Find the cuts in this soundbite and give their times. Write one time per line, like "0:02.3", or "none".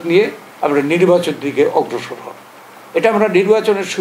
none

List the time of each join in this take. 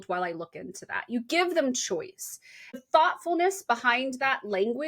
0:02.8

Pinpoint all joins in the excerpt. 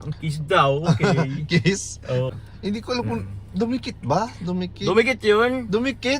0:02.3

